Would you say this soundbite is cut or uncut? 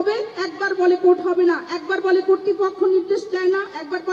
uncut